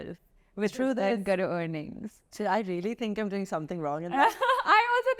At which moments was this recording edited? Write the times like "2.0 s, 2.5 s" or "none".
none